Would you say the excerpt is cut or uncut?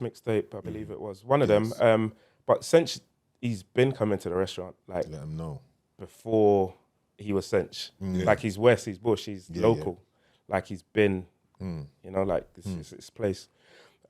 uncut